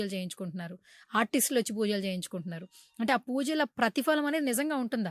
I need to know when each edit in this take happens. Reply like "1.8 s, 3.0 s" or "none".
none

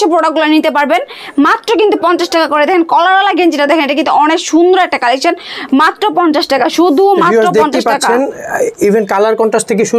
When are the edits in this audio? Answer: none

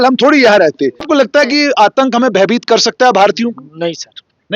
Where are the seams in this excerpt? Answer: 1.0 s

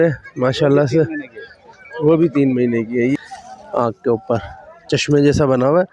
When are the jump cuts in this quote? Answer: 3.1 s

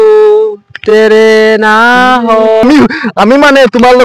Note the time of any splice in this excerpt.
2.6 s

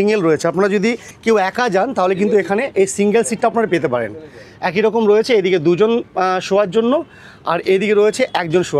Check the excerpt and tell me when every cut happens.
1.1 s

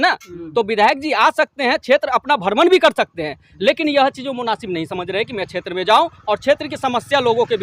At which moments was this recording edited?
none

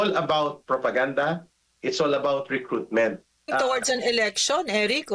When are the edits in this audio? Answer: 3.5 s

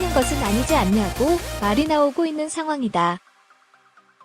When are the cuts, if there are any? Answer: 3.2 s

